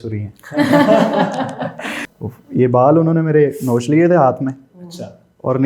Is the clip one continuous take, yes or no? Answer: no